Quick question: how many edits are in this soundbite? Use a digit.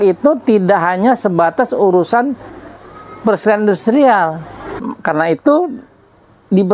1